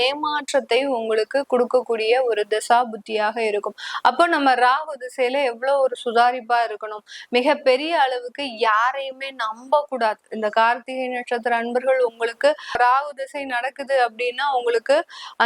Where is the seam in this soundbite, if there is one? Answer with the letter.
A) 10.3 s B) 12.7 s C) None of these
C